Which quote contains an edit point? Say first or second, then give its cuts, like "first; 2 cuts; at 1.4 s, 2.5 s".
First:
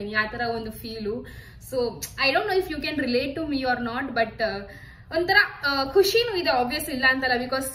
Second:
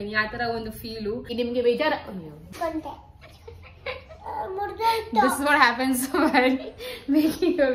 second; 2 cuts; at 1.3 s, 2.5 s